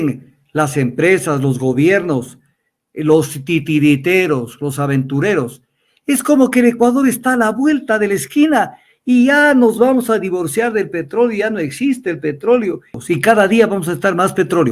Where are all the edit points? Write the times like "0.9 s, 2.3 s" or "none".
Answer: 13.0 s